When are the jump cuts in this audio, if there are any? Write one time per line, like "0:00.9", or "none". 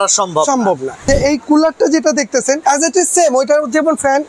0:01.0
0:02.6